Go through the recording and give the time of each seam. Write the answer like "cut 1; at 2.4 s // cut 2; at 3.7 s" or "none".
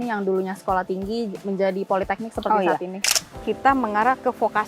cut 1; at 3.0 s